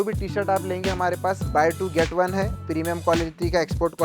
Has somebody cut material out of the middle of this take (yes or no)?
yes